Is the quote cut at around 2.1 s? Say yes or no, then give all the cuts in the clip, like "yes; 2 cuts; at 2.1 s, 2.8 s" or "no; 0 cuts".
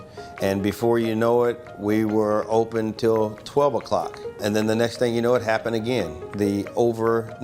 no; 1 cut; at 4.4 s